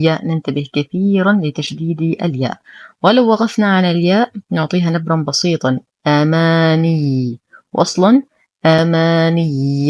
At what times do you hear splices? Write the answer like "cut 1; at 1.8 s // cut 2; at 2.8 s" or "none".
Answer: none